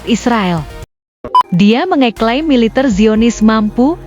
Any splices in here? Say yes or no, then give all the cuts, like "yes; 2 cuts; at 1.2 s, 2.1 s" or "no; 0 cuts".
yes; 1 cut; at 1.2 s